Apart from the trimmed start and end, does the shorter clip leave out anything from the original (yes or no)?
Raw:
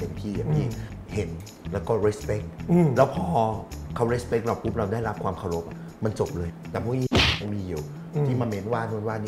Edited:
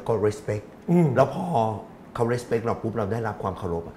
no